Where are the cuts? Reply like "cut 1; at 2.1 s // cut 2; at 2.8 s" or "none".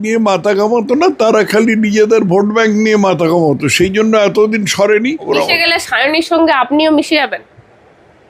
cut 1; at 5.3 s